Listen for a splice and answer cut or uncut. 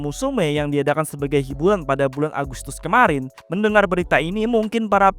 cut